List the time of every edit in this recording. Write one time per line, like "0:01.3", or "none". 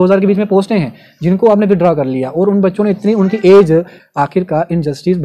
0:04.0